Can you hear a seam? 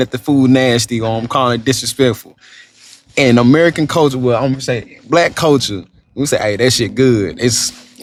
no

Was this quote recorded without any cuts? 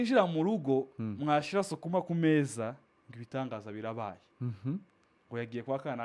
yes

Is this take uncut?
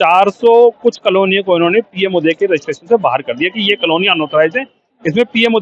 yes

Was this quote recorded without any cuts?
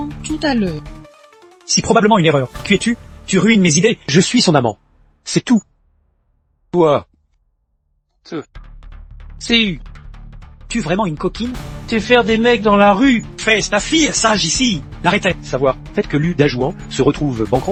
yes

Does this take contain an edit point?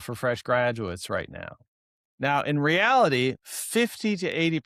no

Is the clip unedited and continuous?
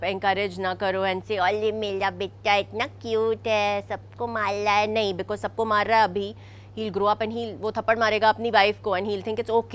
yes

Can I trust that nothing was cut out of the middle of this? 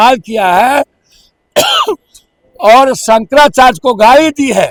yes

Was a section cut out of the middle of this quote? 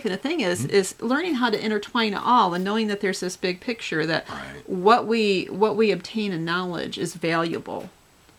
no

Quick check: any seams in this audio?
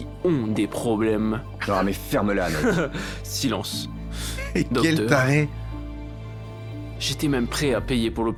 no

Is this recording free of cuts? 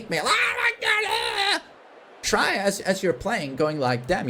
yes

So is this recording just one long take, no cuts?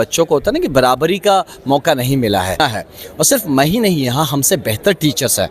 no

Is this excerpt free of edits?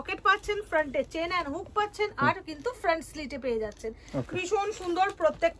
yes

